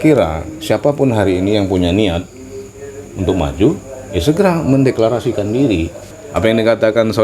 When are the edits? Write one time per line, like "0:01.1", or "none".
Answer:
0:06.1

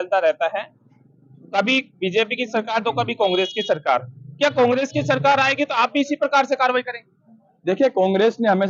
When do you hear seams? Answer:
none

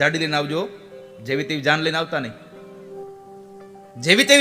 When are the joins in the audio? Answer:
0:02.9

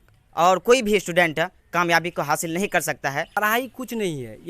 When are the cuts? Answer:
0:03.6

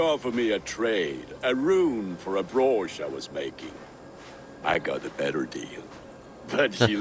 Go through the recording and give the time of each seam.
none

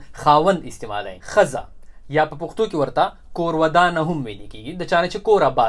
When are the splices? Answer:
0:01.2

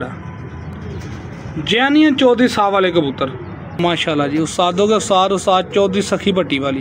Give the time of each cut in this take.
0:03.7

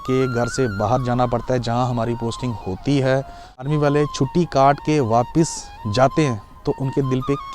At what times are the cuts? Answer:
0:03.7

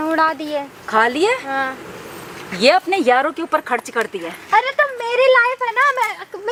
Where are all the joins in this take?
none

